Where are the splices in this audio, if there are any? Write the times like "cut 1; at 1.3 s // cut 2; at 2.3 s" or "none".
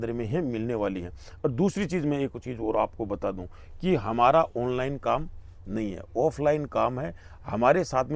none